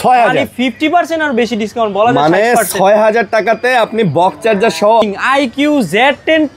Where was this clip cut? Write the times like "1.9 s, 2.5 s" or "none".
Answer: 5.0 s